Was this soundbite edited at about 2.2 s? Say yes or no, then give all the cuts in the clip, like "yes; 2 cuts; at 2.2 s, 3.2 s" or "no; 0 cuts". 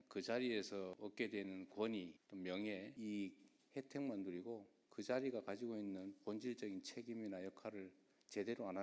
yes; 4 cuts; at 0.9 s, 2.2 s, 2.9 s, 4.8 s